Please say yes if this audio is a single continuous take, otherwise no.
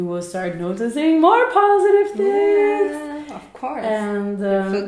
yes